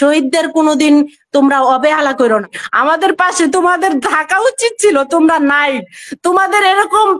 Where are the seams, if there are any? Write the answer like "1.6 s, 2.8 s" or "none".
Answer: 2.6 s